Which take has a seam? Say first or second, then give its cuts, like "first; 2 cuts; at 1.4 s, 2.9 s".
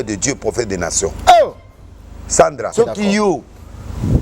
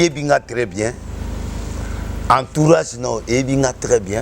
first; 1 cut; at 2.7 s